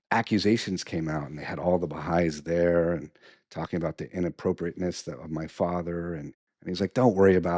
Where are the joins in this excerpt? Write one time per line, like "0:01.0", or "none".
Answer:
0:06.4